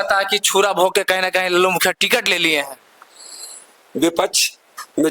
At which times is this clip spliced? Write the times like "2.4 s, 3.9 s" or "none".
none

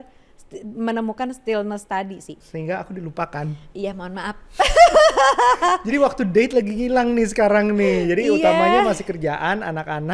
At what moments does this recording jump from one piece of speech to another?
2.3 s

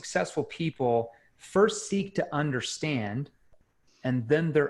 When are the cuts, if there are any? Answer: none

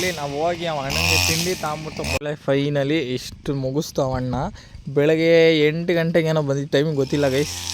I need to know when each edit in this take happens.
2.2 s

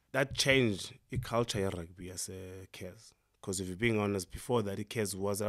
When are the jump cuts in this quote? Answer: none

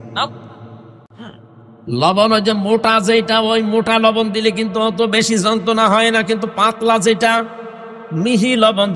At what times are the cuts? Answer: 1.0 s

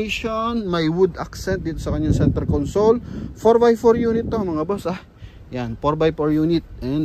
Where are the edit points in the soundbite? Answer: none

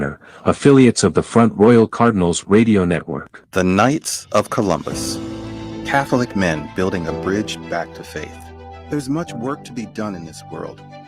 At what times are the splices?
3.5 s

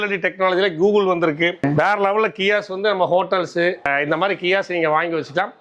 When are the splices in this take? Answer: 1.6 s, 3.9 s

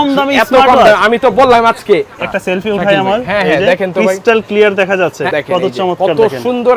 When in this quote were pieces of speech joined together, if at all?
2.2 s, 5.3 s

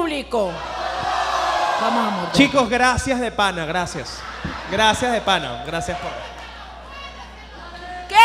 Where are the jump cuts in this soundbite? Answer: 1.9 s

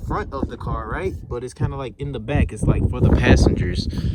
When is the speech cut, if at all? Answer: none

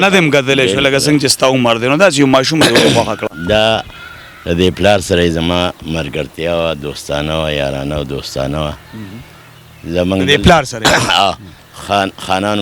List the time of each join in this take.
none

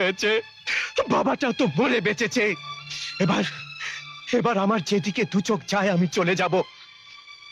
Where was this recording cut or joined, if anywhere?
none

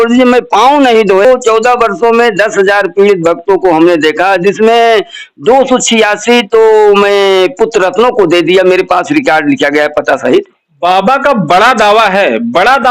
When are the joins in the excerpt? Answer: 1.2 s

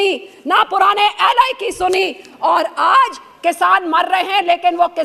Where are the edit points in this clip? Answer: none

